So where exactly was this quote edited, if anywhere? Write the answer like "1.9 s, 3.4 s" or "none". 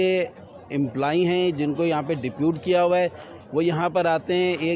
none